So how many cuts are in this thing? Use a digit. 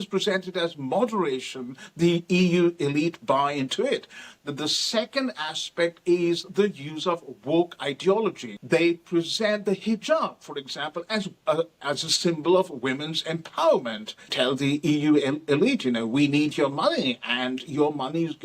2